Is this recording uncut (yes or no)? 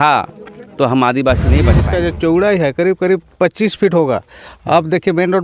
no